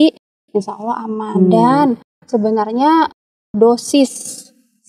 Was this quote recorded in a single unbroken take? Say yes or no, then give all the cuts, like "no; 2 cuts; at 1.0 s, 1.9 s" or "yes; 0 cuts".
yes; 0 cuts